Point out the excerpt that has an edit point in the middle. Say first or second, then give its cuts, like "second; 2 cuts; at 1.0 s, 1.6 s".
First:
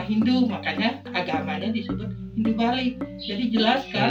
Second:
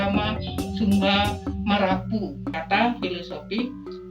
second; 1 cut; at 2.4 s